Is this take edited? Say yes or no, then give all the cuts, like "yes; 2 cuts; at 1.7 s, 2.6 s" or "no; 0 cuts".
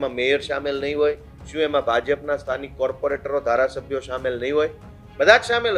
no; 0 cuts